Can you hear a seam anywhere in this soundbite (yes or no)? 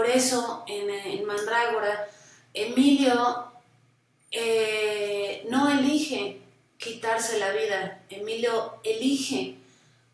no